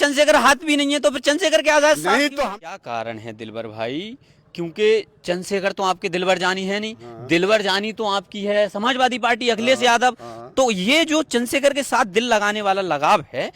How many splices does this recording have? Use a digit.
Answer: 1